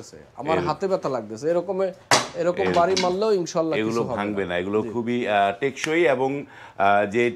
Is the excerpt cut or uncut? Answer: uncut